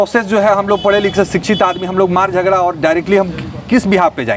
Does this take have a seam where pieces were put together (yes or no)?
no